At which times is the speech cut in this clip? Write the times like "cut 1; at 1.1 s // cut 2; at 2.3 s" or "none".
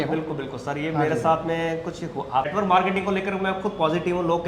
cut 1; at 2.5 s